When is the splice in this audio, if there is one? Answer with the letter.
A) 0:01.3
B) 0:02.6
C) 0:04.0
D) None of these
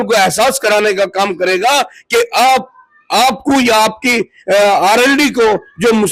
D